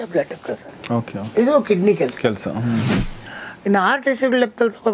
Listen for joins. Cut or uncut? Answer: cut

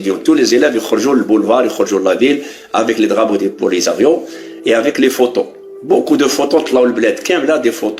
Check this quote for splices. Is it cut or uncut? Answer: uncut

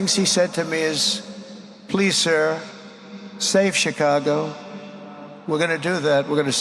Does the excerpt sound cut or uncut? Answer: uncut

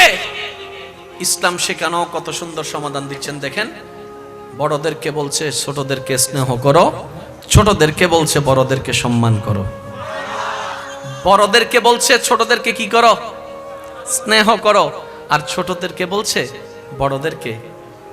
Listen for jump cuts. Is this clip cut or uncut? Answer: cut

